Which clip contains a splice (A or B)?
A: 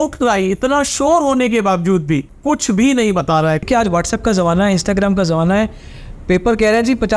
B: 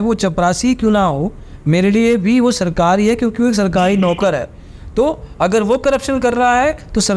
A